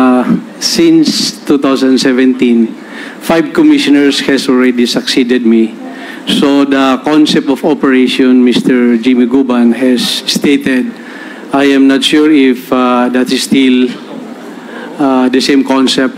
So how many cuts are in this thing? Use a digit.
0